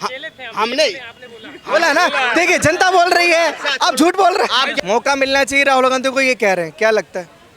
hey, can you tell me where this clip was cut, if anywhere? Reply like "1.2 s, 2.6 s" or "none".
4.7 s

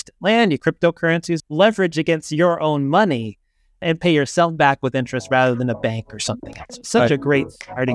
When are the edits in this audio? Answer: 1.1 s

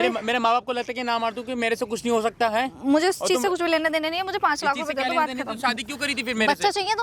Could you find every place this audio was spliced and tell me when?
none

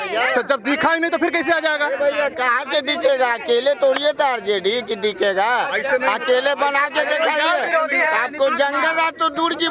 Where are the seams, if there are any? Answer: none

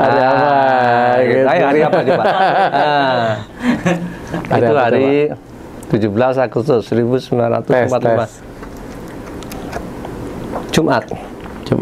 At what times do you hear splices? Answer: none

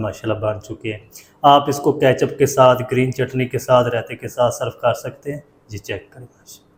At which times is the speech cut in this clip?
none

